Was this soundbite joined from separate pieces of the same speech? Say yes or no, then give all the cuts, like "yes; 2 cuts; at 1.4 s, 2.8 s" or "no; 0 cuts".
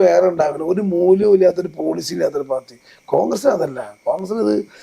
no; 0 cuts